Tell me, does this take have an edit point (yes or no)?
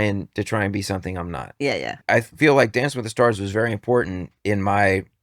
yes